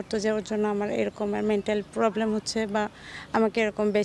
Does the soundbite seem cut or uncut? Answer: uncut